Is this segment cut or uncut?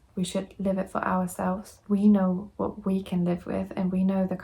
cut